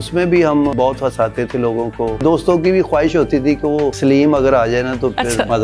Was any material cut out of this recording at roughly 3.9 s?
yes; 3 cuts; at 0.7 s, 2.2 s, 3.9 s

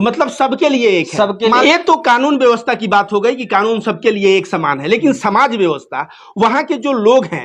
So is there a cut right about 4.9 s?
no; 1 cut; at 1.6 s

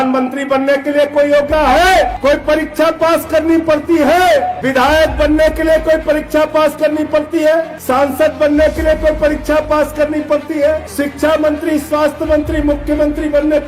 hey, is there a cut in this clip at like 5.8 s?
no; 5 cuts; at 1.5 s, 2.1 s, 4.6 s, 7.7 s, 10.9 s

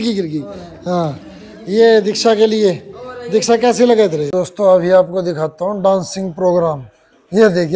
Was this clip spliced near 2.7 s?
no; 1 cut; at 4.3 s

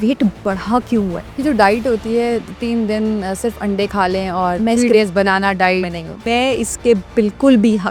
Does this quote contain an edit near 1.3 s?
yes; 2 cuts; at 1.3 s, 6.2 s

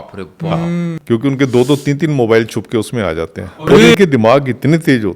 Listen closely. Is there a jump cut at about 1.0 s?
yes; 2 cuts; at 1.0 s, 3.9 s

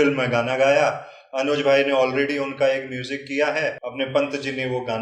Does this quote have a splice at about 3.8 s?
yes; 1 cut; at 3.8 s

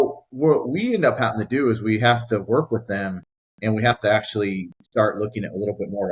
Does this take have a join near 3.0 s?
no; 0 cuts

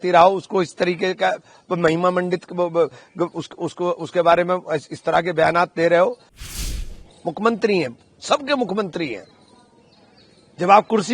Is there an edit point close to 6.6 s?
yes; 1 cut; at 6.6 s

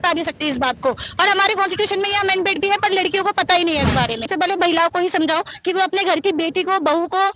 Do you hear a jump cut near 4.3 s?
yes; 1 cut; at 4.3 s

